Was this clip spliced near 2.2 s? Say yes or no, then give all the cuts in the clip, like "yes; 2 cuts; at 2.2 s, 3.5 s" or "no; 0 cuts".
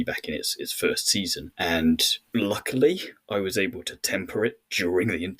yes; 2 cuts; at 1.4 s, 2.2 s